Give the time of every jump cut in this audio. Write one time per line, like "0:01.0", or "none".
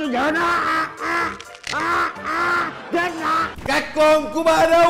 0:03.5